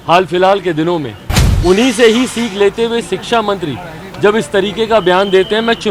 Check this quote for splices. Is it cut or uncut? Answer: uncut